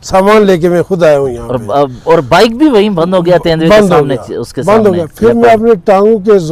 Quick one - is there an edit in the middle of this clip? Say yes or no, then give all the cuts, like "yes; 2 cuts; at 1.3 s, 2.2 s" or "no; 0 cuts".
no; 0 cuts